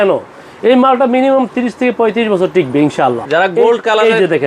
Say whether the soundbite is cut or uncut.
cut